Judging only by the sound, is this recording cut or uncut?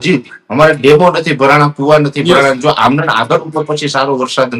uncut